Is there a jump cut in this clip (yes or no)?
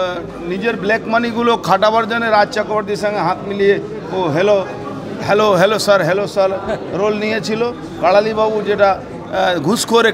no